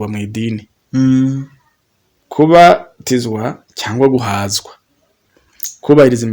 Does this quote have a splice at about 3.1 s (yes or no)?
no